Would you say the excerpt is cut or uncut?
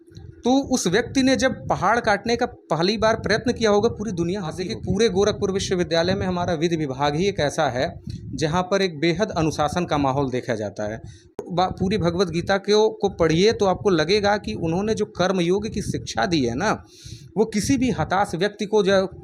cut